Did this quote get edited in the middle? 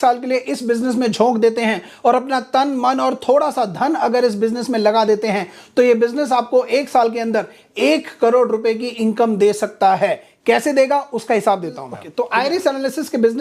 no; 0 cuts

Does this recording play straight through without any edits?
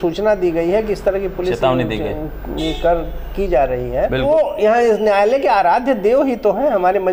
no; 1 cut; at 4.2 s

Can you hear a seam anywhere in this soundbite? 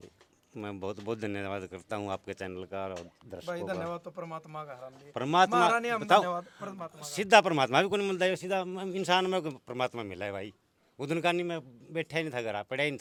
no; 0 cuts

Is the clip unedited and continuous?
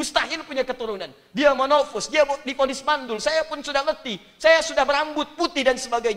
yes; 0 cuts

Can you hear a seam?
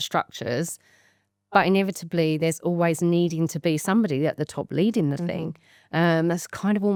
no; 0 cuts

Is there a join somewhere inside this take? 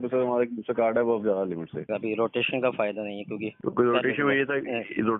yes; 2 cuts; at 1.9 s, 3.5 s

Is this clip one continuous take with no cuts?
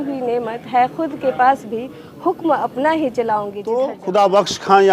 no; 1 cut; at 3.8 s

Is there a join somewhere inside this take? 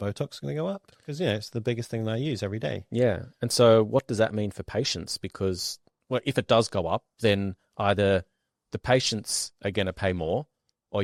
no; 0 cuts

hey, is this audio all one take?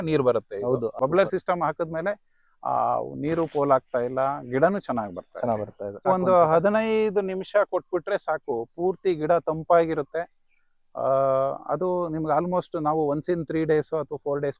no; 2 cuts; at 0.9 s, 6.1 s

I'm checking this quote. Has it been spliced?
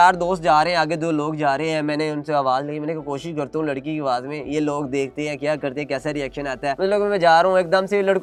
no; 0 cuts

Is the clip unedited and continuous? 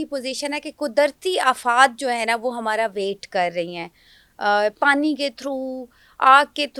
yes; 0 cuts

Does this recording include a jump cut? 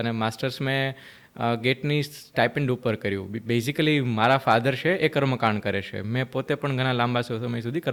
no; 0 cuts

